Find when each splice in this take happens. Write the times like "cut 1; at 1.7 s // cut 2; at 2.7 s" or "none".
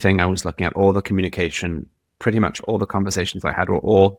none